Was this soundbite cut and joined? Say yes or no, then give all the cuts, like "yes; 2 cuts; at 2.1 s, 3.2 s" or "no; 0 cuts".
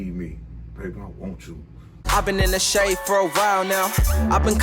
yes; 1 cut; at 2.1 s